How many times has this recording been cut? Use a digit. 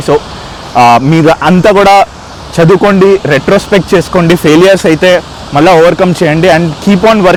0